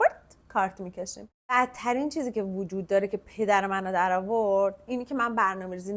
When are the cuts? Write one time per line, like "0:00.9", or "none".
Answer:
0:01.6